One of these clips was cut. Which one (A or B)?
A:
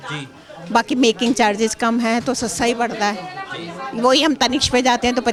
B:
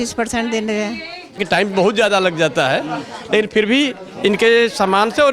B